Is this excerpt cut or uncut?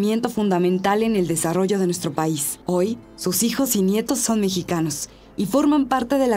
cut